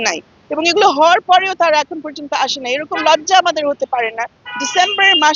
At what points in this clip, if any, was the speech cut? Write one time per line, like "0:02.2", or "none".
none

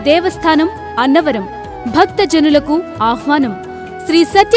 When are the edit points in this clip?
0:03.5

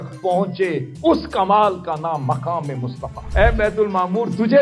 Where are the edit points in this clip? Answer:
0:03.2

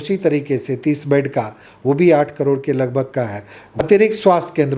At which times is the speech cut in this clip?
0:03.8

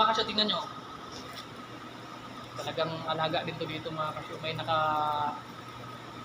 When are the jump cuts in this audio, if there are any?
0:01.2

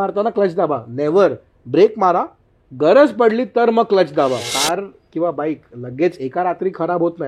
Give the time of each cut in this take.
0:04.5

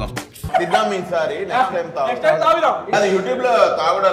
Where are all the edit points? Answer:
0:02.9

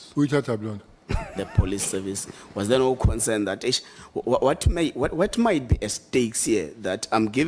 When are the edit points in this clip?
0:01.4

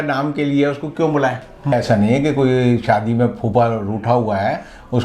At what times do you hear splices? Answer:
0:01.7

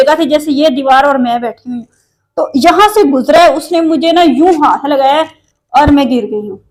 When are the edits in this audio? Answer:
none

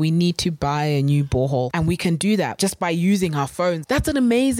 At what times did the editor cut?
0:01.7
0:02.5
0:03.8

